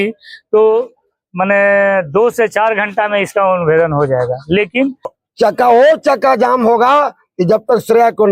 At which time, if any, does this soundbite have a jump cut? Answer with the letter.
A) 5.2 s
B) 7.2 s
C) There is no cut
A